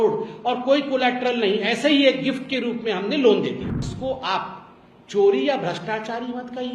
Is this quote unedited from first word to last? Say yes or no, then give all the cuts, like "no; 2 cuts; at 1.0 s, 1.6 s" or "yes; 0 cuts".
no; 1 cut; at 3.9 s